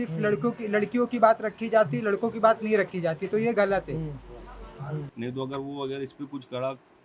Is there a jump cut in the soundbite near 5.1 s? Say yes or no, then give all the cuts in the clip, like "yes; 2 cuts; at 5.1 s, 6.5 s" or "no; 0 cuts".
yes; 1 cut; at 5.1 s